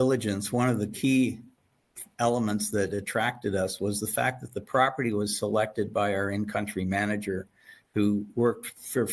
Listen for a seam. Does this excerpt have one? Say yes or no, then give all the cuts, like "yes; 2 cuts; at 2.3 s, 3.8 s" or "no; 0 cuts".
no; 0 cuts